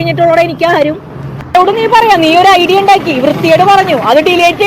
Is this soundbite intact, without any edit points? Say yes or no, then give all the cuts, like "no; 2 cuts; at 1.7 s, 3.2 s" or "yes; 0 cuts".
no; 1 cut; at 1.2 s